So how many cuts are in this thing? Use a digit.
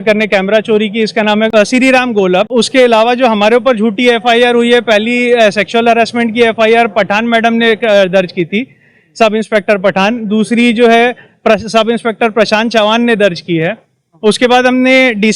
2